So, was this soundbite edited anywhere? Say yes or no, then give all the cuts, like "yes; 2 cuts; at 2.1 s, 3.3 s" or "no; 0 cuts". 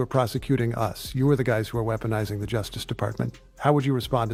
no; 0 cuts